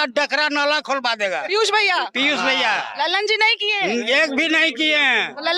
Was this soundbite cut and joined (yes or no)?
no